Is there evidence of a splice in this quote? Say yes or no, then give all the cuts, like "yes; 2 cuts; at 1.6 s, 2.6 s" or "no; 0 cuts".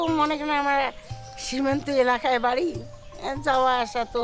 no; 0 cuts